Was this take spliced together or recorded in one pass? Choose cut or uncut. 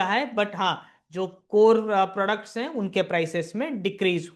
uncut